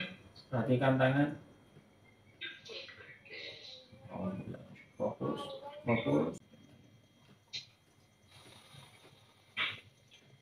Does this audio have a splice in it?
yes; 1 cut; at 6.4 s

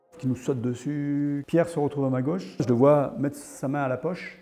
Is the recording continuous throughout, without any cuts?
no; 2 cuts; at 1.4 s, 2.6 s

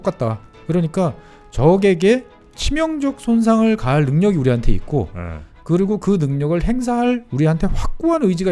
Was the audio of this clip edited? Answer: no; 0 cuts

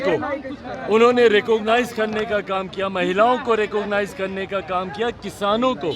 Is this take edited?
no; 0 cuts

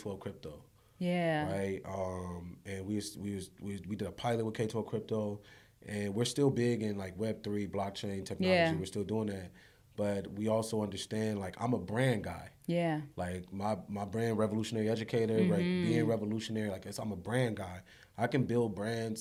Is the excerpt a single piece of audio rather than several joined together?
yes; 0 cuts

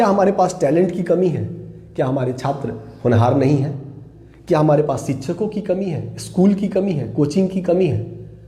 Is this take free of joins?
yes; 0 cuts

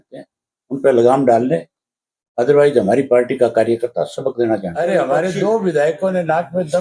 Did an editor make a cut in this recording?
yes; 1 cut; at 4.8 s

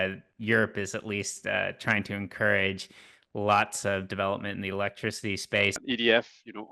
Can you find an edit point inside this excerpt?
yes; 1 cut; at 5.8 s

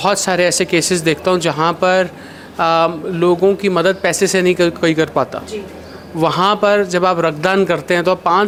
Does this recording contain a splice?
no; 0 cuts

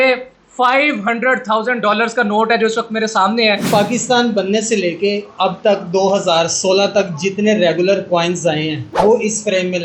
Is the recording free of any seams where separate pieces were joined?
no; 2 cuts; at 3.7 s, 8.8 s

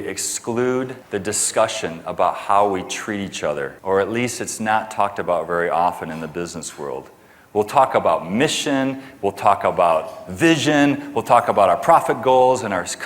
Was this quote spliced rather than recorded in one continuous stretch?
yes; 2 cuts; at 1.0 s, 3.7 s

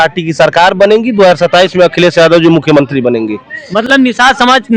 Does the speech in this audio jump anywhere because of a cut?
no; 0 cuts

